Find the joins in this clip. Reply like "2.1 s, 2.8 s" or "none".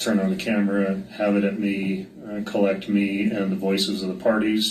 none

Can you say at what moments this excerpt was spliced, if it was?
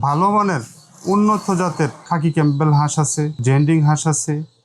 2.0 s, 3.4 s

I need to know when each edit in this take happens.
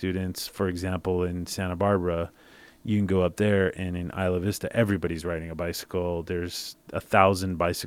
none

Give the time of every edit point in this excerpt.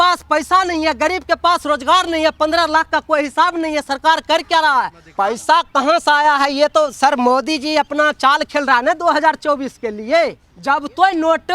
5.0 s, 10.5 s

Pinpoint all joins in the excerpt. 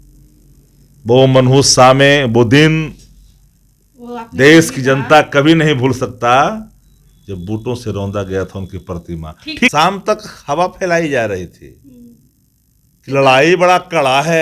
9.7 s

